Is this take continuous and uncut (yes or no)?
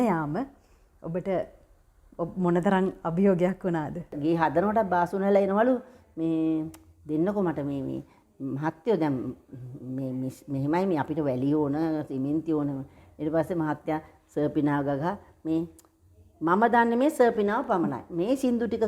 no